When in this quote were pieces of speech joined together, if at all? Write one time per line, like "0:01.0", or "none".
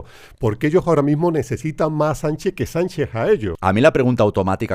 0:03.5